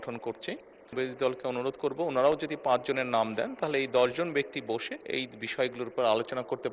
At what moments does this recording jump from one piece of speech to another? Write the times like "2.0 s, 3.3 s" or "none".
0.9 s